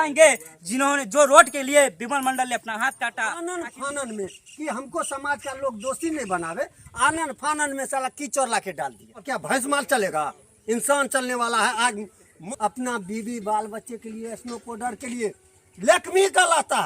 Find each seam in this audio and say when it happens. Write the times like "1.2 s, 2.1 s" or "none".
3.2 s, 9.2 s, 12.4 s